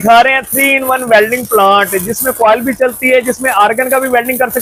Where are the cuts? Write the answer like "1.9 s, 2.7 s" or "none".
none